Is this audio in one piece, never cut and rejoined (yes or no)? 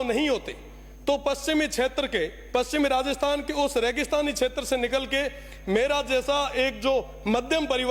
yes